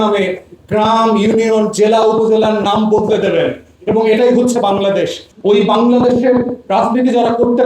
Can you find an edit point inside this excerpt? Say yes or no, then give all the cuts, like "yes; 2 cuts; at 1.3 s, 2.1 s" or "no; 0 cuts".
yes; 1 cut; at 5.3 s